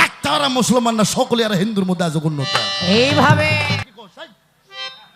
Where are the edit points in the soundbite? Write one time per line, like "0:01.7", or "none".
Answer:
0:03.8